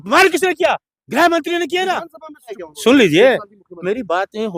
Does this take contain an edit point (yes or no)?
yes